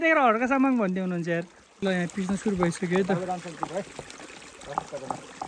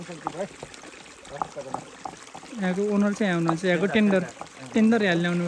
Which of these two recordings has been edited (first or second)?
first